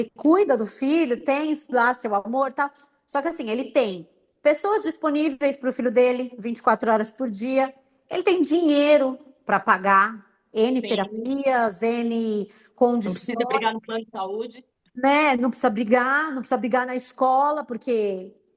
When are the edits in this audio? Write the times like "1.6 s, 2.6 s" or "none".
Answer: none